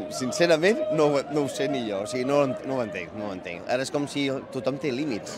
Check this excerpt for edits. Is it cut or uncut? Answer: uncut